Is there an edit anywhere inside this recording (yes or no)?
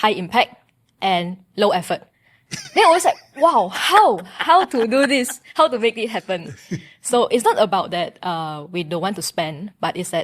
no